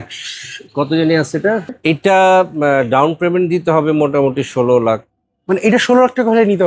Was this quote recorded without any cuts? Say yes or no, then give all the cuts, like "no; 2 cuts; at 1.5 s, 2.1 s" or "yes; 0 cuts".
no; 1 cut; at 1.8 s